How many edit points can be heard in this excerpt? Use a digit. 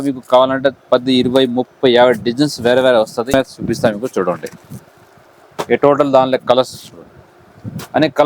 1